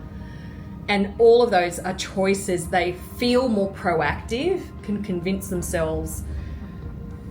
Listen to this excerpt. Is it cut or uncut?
cut